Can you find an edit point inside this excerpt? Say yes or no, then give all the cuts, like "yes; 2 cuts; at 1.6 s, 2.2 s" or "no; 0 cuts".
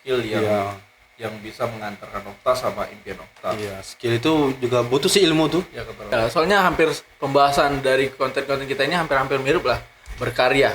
yes; 1 cut; at 6.1 s